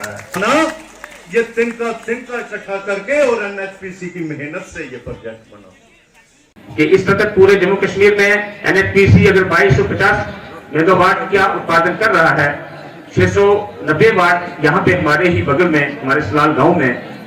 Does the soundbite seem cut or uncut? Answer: cut